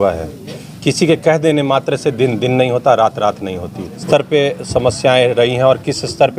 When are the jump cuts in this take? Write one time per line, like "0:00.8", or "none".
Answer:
0:04.0